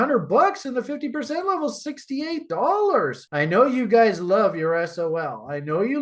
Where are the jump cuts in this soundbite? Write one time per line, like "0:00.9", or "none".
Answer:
none